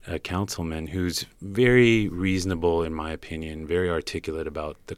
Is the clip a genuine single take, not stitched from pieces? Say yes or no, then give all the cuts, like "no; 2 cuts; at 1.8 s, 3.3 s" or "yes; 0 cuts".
no; 1 cut; at 1.3 s